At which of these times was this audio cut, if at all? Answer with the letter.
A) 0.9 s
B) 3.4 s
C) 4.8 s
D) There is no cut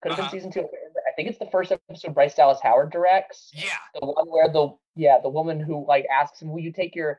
C